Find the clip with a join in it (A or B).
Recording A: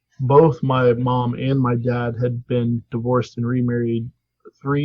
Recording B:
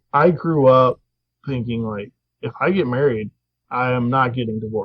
A